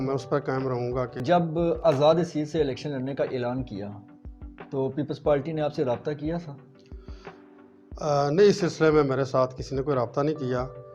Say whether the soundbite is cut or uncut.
cut